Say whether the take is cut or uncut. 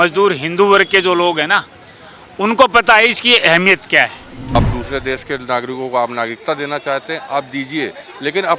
cut